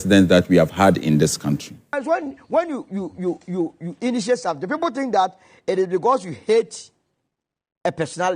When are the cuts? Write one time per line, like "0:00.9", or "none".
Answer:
0:02.0